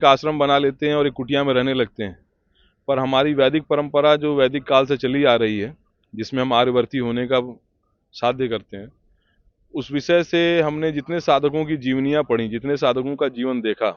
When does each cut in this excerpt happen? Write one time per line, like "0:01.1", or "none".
none